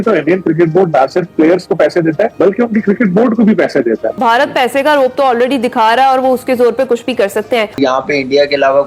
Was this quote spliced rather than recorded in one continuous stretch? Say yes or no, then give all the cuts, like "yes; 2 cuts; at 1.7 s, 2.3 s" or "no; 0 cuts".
yes; 2 cuts; at 4.2 s, 7.7 s